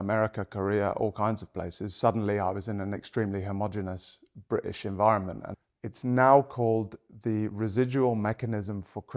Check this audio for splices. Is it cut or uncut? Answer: cut